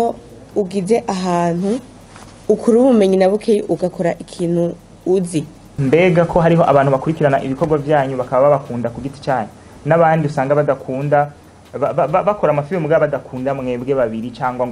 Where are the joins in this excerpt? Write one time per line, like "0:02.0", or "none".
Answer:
0:05.6